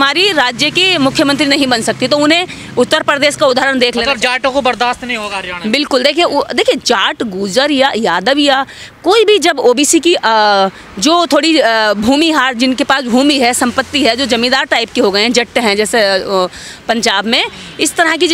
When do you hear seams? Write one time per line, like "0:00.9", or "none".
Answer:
none